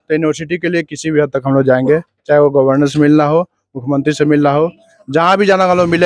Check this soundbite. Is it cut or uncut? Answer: uncut